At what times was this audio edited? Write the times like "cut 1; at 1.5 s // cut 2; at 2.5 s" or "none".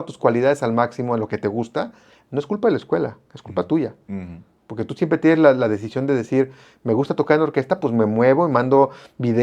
none